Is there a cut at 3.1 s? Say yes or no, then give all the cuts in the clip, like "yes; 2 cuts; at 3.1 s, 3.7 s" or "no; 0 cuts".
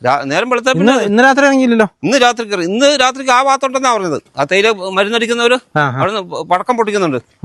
no; 0 cuts